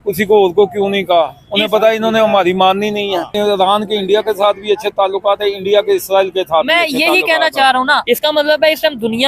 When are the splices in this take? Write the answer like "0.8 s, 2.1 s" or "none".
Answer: 3.3 s, 8.0 s